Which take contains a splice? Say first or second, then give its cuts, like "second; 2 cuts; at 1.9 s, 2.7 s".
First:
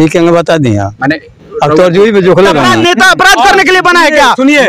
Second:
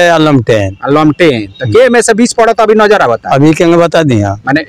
first; 1 cut; at 2.7 s